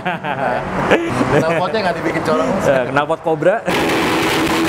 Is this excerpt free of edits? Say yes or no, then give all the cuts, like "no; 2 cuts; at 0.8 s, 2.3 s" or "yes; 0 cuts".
yes; 0 cuts